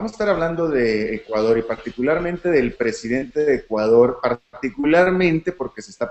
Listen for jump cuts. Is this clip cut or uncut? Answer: uncut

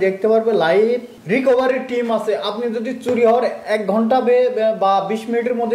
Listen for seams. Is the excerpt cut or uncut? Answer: cut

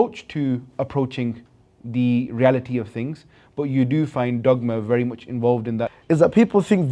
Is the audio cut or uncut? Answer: cut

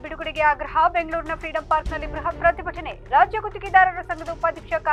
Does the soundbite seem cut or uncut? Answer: uncut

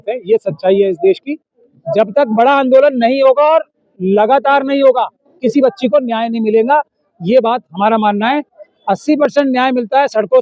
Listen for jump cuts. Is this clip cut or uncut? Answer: uncut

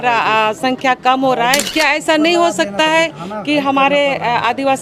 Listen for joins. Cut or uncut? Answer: cut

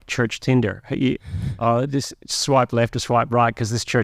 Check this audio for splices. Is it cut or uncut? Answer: uncut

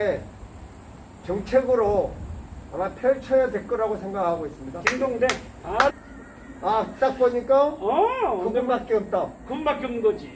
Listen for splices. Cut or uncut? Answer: cut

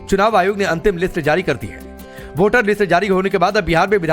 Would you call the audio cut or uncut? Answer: uncut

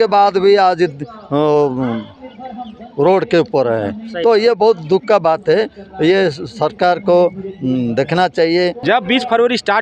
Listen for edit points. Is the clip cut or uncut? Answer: cut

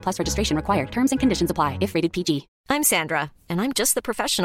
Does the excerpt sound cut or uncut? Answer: cut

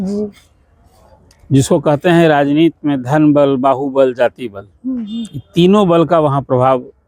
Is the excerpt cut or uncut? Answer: uncut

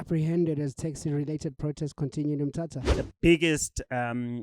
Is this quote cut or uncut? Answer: cut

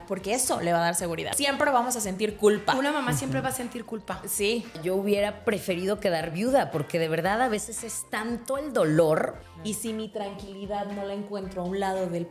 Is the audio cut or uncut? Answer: cut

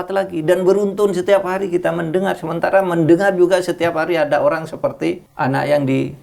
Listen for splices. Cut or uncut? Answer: cut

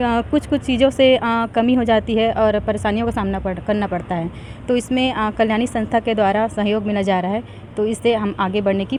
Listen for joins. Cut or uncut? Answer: uncut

